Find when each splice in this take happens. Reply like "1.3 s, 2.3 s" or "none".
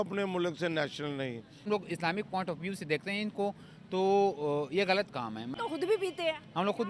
1.7 s, 5.5 s